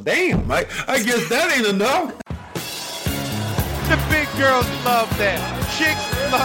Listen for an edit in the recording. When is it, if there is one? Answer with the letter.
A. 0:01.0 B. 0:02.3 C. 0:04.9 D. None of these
B